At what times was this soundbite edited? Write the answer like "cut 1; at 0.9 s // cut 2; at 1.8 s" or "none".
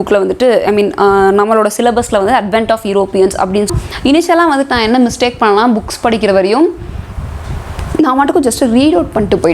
cut 1; at 3.7 s